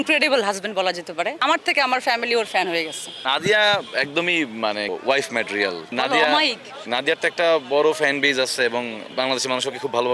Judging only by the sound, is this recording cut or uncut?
cut